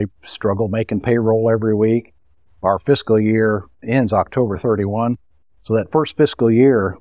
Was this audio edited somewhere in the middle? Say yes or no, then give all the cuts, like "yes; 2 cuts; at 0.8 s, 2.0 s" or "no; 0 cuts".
no; 0 cuts